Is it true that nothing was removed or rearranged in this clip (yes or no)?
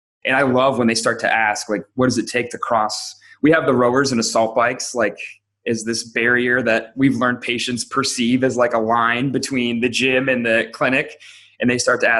yes